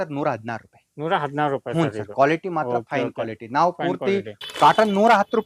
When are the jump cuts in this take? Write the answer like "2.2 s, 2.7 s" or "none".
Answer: 4.4 s